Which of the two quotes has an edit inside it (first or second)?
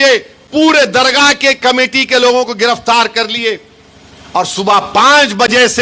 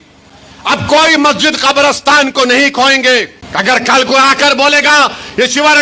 second